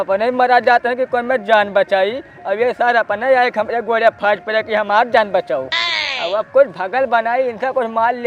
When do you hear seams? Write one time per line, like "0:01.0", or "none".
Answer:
none